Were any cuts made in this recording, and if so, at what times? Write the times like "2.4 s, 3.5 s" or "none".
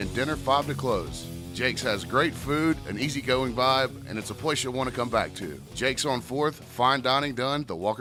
none